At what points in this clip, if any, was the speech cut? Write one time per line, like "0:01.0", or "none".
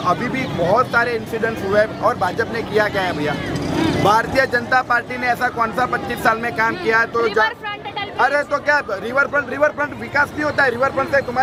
none